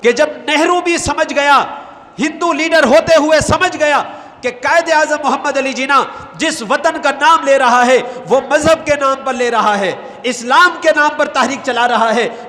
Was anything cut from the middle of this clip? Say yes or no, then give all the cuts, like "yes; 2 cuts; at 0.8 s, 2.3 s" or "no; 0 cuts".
no; 0 cuts